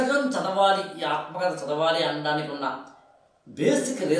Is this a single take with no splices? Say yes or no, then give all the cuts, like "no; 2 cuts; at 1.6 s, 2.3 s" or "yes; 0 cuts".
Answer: yes; 0 cuts